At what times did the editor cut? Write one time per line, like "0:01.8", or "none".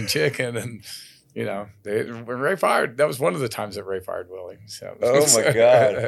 none